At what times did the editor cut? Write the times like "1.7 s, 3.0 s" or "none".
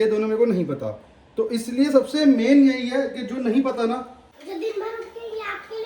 4.2 s